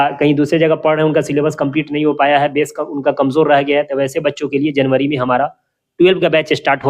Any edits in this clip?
no; 0 cuts

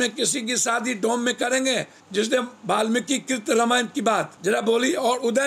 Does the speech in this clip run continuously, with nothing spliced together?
no; 2 cuts; at 1.9 s, 4.3 s

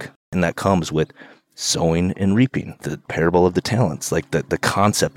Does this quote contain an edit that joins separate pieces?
yes; 1 cut; at 2.7 s

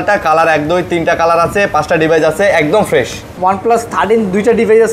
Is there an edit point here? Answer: yes; 1 cut; at 3.2 s

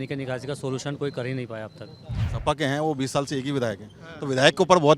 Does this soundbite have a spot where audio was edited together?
yes; 1 cut; at 2.3 s

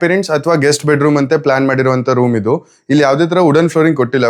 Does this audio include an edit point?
no; 0 cuts

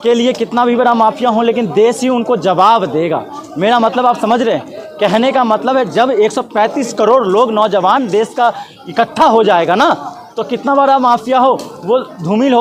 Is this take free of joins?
yes; 0 cuts

